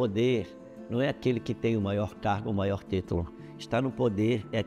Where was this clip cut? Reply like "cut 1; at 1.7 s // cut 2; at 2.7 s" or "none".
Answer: none